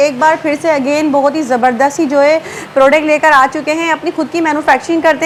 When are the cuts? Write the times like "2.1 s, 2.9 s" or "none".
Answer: none